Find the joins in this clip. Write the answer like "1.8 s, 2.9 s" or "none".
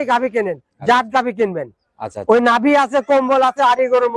none